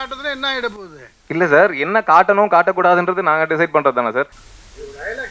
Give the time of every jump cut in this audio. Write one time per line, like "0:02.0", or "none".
0:04.4

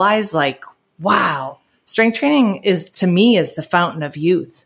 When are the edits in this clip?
none

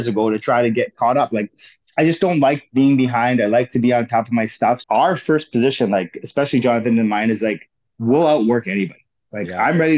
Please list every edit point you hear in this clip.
0:04.8

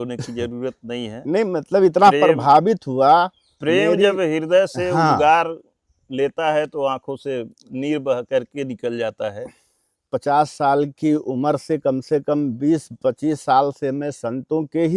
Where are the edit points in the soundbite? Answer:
0:10.0

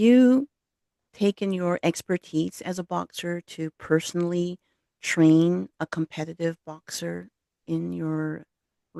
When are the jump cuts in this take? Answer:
none

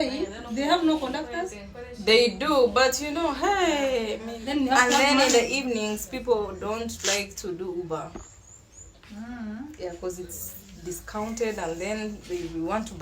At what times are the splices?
0:04.3

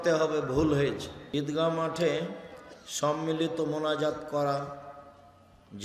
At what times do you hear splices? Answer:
0:01.2

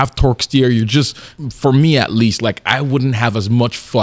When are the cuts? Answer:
0:01.2

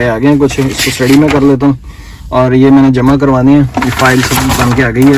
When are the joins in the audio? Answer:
none

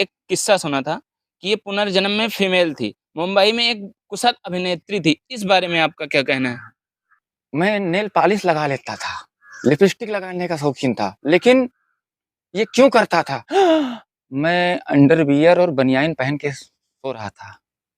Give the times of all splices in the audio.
0:07.4
0:13.4

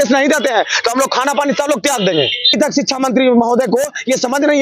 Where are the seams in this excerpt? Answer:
0:02.5

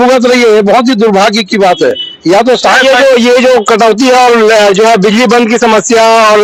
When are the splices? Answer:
none

